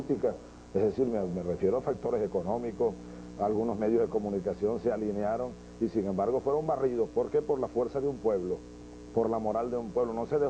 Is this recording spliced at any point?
no; 0 cuts

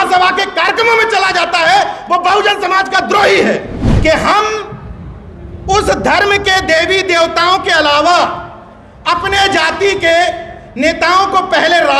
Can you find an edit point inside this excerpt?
yes; 1 cut; at 3.8 s

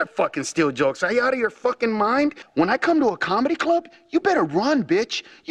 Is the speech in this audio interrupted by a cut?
no; 0 cuts

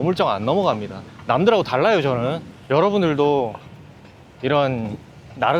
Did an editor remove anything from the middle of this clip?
yes; 1 cut; at 2.5 s

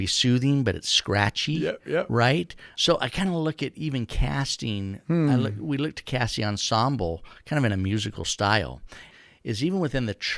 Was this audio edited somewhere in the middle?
yes; 2 cuts; at 2.6 s, 9.1 s

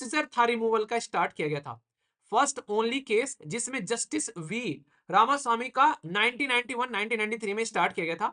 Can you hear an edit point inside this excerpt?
no; 0 cuts

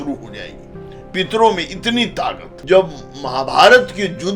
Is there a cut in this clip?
yes; 1 cut; at 2.5 s

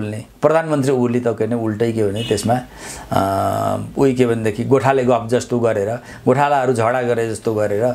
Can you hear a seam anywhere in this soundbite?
no; 0 cuts

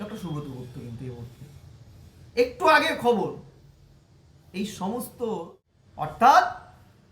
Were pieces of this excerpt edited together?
yes; 1 cut; at 6.1 s

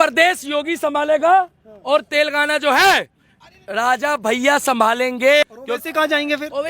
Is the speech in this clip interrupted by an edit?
yes; 1 cut; at 5.4 s

